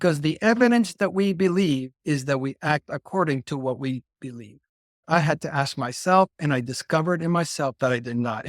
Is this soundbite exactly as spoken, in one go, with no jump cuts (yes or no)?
no